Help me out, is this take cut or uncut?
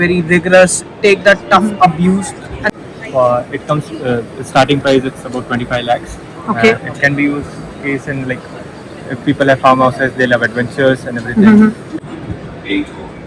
cut